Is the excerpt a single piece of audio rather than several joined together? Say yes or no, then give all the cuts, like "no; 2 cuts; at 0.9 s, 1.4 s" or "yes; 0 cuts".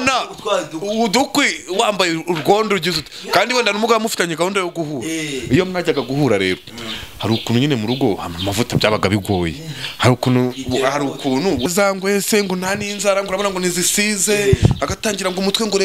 no; 1 cut; at 11.6 s